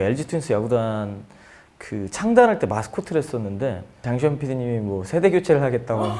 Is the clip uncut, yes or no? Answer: no